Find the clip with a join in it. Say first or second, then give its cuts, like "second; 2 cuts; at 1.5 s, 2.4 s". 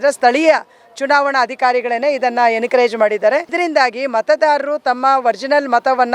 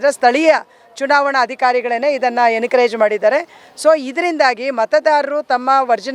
first; 1 cut; at 3.5 s